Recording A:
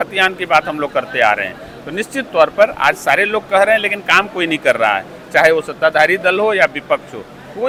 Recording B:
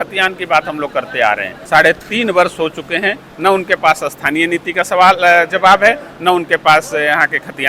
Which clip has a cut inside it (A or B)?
B